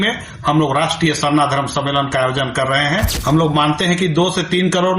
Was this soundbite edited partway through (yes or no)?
yes